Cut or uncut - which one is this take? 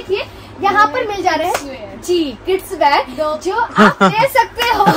uncut